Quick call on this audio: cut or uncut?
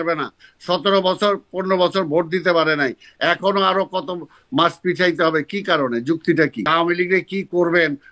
cut